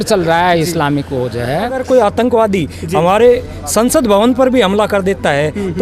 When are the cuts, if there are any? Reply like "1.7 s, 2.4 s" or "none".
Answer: 1.8 s